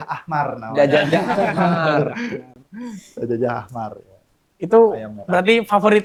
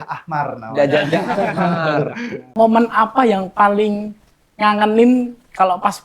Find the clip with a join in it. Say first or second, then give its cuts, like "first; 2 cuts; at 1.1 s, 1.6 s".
second; 1 cut; at 2.5 s